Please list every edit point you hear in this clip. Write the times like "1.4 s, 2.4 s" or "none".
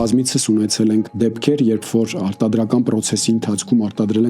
1.1 s